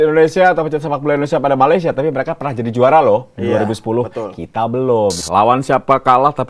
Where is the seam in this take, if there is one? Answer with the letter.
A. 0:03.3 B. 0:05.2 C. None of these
B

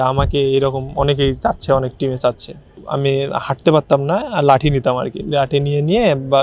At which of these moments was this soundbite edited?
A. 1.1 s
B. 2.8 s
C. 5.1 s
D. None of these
B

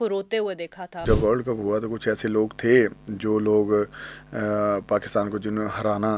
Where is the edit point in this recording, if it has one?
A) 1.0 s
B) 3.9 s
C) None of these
A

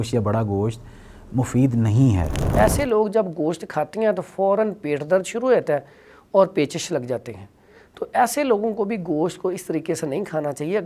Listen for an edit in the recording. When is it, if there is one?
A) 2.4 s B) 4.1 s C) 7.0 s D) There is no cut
A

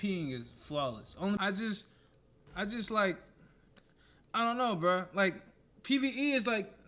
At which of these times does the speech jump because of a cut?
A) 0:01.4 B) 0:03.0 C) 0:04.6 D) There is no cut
A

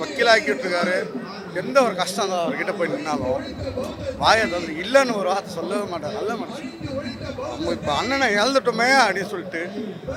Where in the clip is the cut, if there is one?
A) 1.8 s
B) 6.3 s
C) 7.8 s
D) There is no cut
D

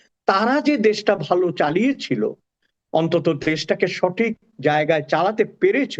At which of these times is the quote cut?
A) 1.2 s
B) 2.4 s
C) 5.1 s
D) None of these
D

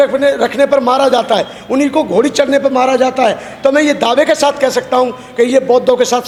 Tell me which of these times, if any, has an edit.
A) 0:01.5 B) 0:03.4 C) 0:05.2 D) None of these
D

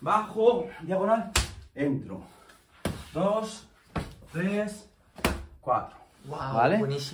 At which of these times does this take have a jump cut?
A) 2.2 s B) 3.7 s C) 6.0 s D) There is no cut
D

